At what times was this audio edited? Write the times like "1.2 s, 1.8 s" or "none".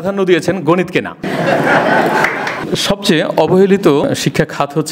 1.2 s, 2.6 s, 4.0 s